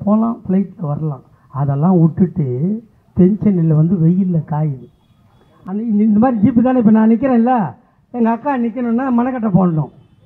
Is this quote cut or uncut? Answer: uncut